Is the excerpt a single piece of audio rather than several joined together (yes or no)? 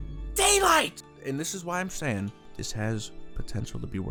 yes